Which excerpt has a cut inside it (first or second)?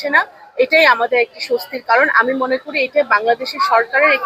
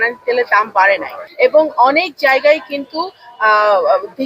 second